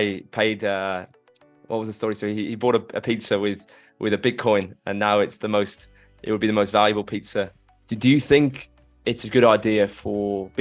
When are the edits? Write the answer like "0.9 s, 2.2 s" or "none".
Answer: 7.6 s